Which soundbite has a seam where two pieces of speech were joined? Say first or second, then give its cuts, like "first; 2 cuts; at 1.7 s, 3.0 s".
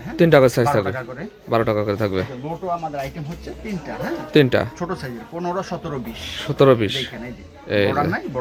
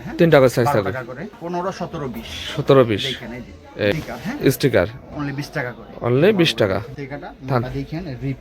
second; 3 cuts; at 1.3 s, 3.9 s, 6.9 s